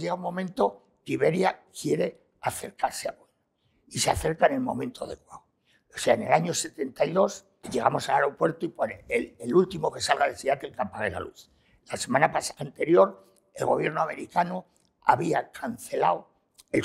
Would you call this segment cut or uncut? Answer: cut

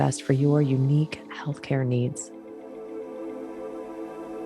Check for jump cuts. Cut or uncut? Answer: cut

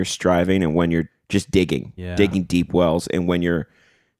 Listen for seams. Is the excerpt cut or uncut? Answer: cut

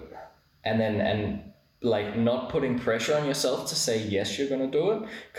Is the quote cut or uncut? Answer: uncut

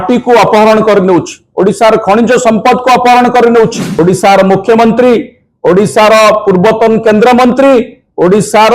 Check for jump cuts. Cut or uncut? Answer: cut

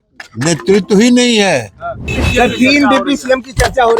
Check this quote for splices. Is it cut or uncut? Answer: cut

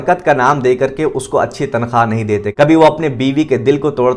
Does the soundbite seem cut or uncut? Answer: cut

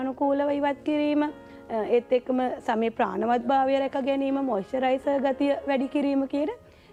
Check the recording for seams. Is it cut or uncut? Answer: uncut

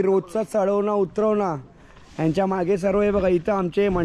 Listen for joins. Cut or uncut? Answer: uncut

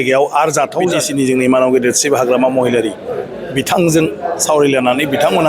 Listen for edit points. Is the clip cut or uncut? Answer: cut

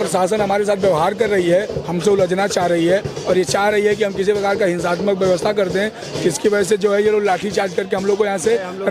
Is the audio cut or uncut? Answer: uncut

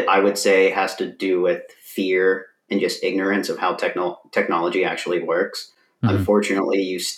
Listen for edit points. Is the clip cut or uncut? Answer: uncut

